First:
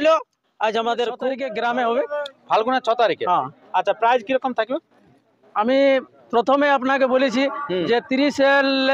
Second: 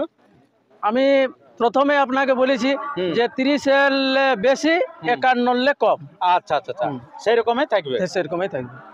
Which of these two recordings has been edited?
first; 1 cut; at 1.4 s

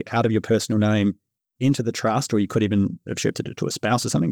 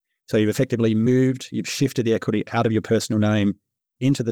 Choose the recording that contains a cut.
second; 1 cut; at 1.1 s

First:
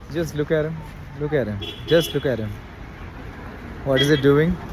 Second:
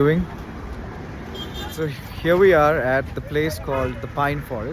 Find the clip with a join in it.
second; 1 cut; at 1.8 s

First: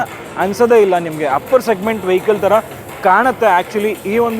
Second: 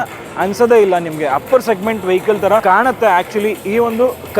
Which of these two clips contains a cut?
second; 1 cut; at 2.6 s

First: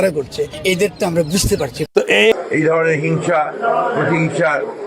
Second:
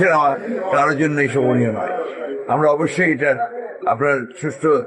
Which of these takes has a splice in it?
first; 1 cut; at 2.3 s

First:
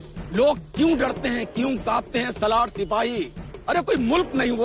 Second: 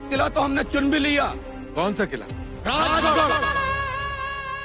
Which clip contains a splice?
second; 1 cut; at 3.4 s

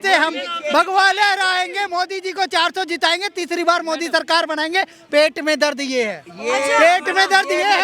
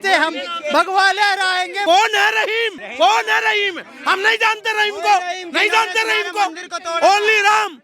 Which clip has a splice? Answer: second; 2 cuts; at 1.8 s, 2.8 s

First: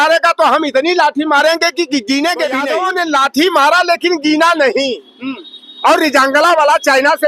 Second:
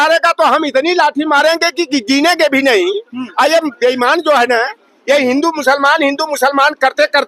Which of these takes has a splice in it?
first; 1 cut; at 2.6 s

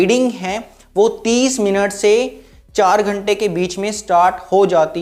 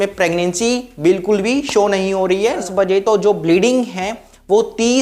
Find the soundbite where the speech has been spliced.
second; 1 cut; at 2.6 s

